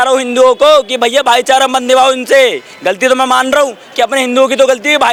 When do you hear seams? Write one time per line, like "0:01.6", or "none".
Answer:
none

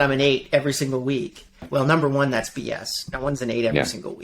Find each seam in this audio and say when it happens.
0:01.6

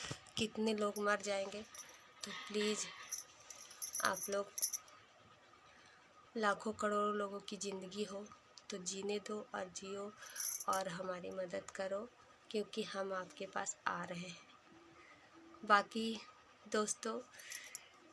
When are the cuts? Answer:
none

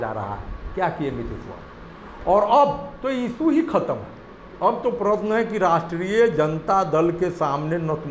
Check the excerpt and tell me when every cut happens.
none

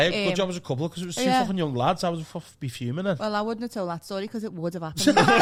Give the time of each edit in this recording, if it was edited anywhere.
none

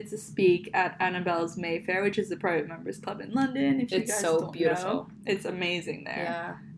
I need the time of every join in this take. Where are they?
none

